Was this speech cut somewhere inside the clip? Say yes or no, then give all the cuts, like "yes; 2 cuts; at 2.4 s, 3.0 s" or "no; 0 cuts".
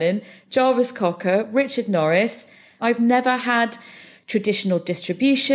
yes; 1 cut; at 2.8 s